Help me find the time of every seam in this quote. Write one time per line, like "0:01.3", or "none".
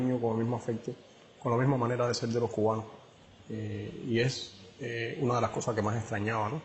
0:01.0

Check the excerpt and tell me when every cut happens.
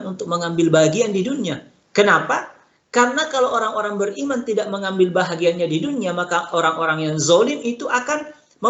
none

